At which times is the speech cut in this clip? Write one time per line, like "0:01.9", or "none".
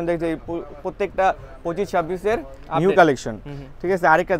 none